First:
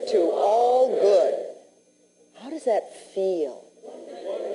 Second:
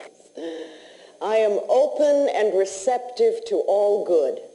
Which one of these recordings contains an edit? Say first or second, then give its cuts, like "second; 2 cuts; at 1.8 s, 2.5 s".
first; 1 cut; at 1.3 s